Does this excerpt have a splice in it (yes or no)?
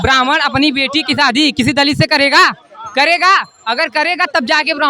no